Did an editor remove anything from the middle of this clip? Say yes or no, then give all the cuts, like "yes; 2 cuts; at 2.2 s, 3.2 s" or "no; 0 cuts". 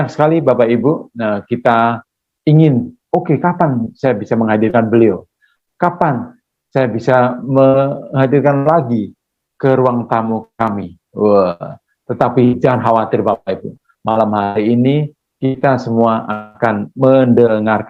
no; 0 cuts